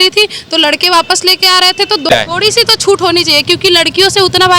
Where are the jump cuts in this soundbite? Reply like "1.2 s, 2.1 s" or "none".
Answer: 2.1 s